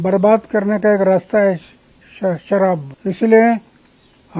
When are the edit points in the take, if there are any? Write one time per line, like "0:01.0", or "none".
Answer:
0:02.9